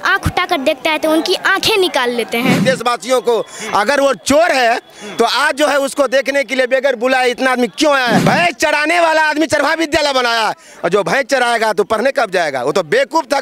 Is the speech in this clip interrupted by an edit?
yes; 2 cuts; at 2.6 s, 8.2 s

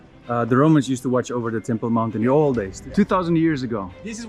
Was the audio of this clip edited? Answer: no; 0 cuts

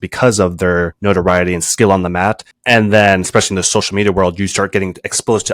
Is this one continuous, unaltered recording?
no; 1 cut; at 0.9 s

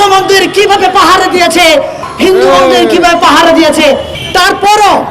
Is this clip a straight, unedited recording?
no; 2 cuts; at 2.1 s, 4.1 s

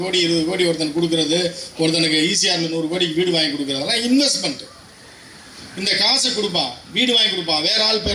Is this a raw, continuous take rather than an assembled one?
yes; 0 cuts

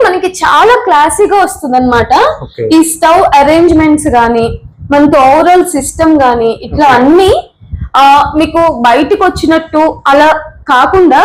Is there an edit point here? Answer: no; 0 cuts

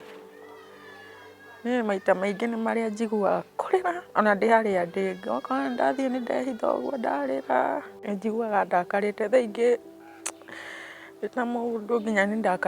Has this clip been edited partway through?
yes; 1 cut; at 7.9 s

